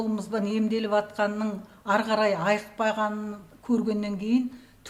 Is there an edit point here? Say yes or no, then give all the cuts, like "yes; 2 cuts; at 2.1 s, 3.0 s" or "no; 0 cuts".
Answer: no; 0 cuts